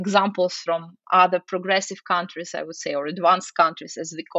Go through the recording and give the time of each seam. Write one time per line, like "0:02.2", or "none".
none